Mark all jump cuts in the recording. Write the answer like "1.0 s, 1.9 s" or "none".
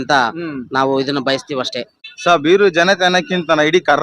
2.0 s